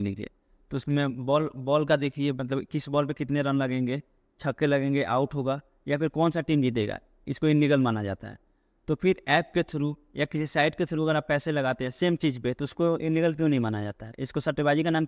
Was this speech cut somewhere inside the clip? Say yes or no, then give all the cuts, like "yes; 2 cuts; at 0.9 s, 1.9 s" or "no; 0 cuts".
no; 0 cuts